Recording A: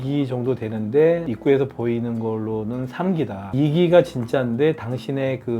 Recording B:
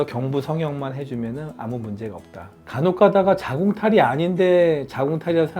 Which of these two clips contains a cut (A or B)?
B